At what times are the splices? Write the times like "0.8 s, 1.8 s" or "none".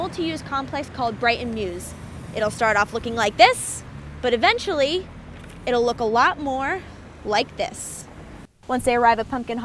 8.5 s